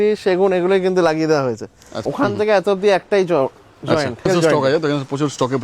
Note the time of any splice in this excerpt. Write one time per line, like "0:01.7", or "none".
0:02.1
0:04.3